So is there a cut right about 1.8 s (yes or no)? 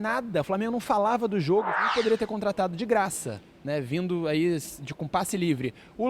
yes